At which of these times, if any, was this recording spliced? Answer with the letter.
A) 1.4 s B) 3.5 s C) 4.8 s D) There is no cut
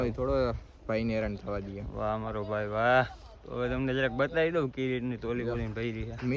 D